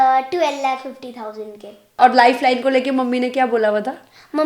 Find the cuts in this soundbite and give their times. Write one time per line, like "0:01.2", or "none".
0:02.0